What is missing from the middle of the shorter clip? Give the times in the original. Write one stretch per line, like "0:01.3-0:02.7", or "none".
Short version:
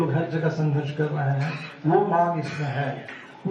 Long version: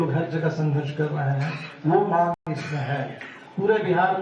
0:02.4-0:02.5